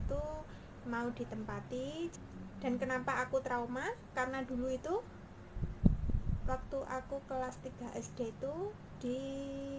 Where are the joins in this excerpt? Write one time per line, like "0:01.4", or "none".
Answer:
0:02.1